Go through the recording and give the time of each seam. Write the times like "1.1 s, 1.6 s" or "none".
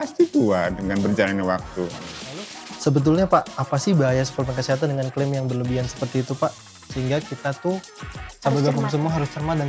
2.6 s